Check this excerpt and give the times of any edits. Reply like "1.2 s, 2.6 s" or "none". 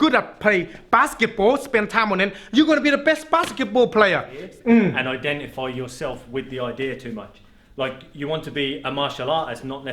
4.4 s